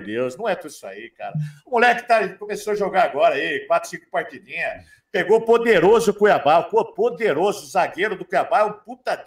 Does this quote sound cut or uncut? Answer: uncut